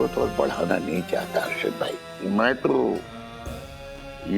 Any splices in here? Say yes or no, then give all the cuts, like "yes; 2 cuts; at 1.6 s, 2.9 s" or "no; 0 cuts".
yes; 1 cut; at 2.0 s